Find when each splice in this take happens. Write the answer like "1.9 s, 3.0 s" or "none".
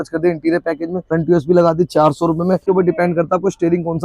1.0 s, 2.6 s

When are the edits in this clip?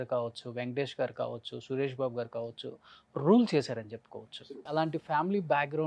4.6 s

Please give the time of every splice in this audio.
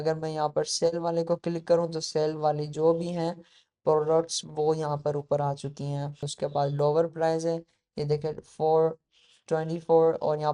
6.3 s

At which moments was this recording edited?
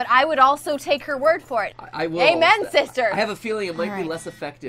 1.7 s

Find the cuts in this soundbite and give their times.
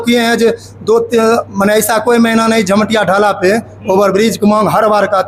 none

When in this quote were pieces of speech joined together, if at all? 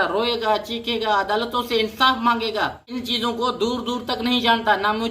2.9 s

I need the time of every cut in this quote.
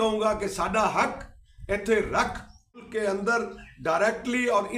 2.9 s

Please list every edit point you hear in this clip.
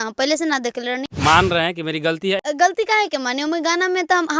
1.0 s, 2.4 s

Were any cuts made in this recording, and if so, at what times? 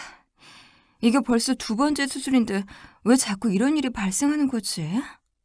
none

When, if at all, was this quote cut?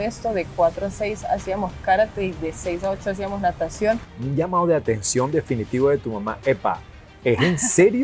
4.1 s

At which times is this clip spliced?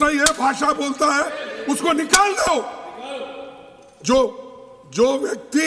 none

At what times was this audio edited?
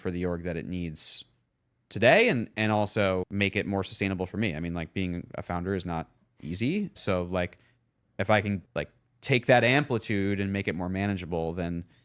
3.3 s, 7.0 s, 8.7 s

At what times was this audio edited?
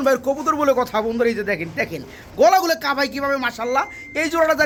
none

